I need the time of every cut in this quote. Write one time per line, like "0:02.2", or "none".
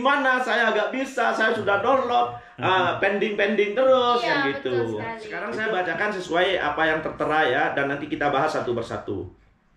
0:05.3